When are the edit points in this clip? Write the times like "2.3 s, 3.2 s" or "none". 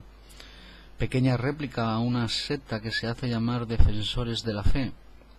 2.6 s

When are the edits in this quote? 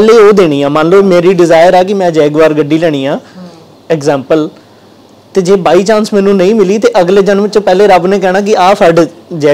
none

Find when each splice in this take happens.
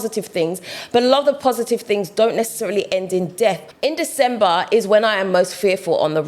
3.7 s

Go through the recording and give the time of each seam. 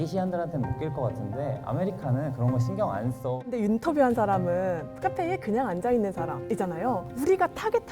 3.6 s

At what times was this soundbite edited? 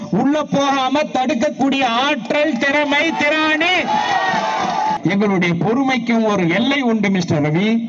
5.0 s

